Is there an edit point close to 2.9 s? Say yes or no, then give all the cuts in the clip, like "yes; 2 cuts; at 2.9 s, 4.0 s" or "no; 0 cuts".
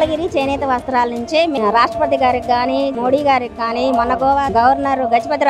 no; 2 cuts; at 1.6 s, 4.5 s